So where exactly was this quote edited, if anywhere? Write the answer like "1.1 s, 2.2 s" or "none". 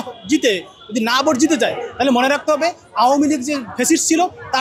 none